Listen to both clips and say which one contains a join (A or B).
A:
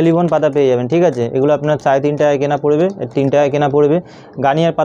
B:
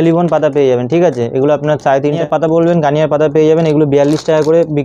B